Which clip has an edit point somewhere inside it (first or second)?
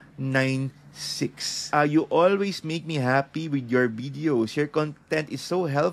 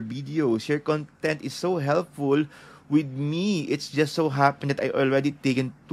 first